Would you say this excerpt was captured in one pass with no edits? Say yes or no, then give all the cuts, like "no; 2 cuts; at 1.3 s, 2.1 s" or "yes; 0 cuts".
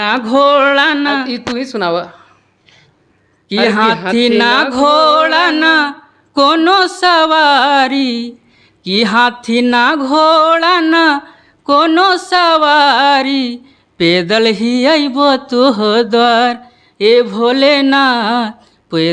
yes; 0 cuts